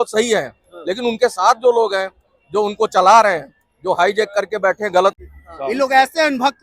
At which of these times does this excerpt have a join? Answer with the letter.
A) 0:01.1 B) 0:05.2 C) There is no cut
B